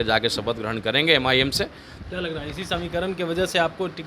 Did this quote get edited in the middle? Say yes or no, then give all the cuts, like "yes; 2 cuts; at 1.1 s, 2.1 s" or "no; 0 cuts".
yes; 1 cut; at 1.9 s